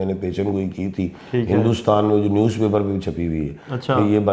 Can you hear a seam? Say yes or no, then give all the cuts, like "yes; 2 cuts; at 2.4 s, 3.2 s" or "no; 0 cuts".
no; 0 cuts